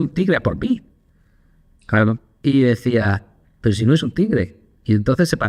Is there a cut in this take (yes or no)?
no